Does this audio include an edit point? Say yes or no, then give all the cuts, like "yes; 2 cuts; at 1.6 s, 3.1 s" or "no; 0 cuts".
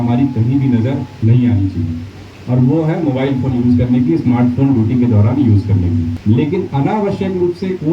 yes; 1 cut; at 6.2 s